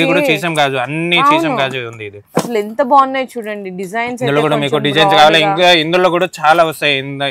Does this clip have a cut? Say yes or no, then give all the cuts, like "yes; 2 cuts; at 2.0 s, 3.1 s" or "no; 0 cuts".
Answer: no; 0 cuts